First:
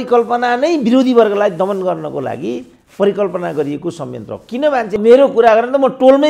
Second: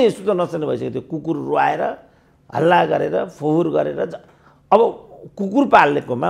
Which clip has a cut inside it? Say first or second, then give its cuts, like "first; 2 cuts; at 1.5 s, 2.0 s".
first; 1 cut; at 4.9 s